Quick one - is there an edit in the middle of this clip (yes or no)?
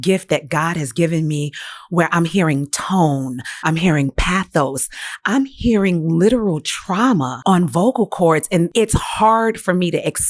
yes